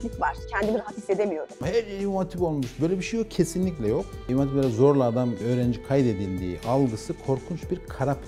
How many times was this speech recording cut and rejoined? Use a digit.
1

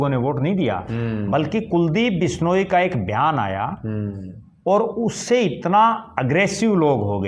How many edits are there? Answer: 0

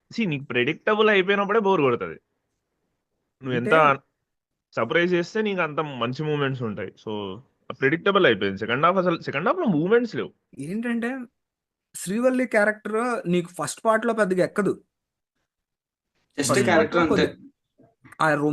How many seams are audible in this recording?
1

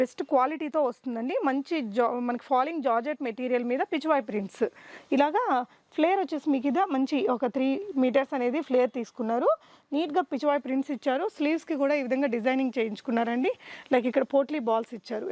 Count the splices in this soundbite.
0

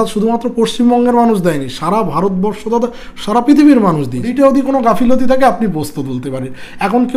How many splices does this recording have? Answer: 1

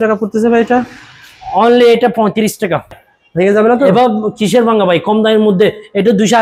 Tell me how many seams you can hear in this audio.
1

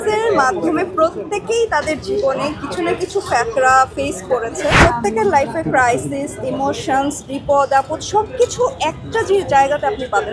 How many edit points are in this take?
1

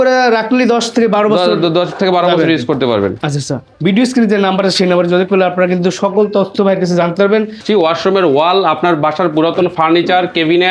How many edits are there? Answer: 2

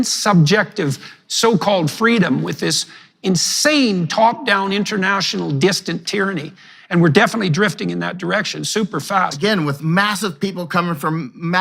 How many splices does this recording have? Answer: 1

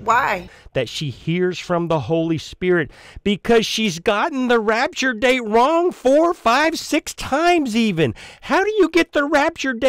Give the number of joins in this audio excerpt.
0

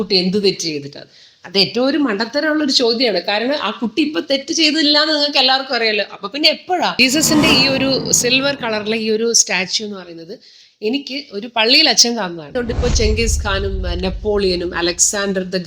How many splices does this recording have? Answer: 2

